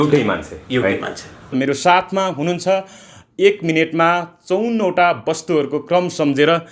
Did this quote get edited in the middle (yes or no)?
yes